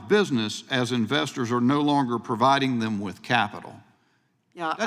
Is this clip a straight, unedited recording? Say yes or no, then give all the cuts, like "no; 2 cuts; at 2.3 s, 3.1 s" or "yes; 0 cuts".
yes; 0 cuts